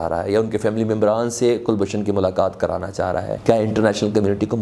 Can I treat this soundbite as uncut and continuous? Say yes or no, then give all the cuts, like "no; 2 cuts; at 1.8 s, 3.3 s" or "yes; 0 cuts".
no; 1 cut; at 3.3 s